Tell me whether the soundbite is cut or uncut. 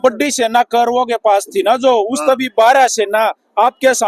uncut